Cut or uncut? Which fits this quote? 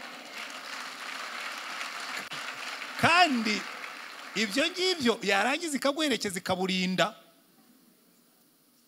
uncut